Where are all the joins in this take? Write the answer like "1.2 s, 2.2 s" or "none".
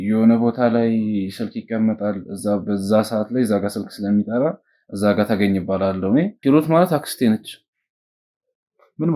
6.3 s